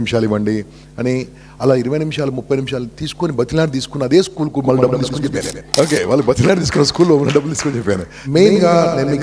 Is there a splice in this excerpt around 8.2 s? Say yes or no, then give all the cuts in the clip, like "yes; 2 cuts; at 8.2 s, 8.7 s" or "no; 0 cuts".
yes; 2 cuts; at 5.6 s, 8.2 s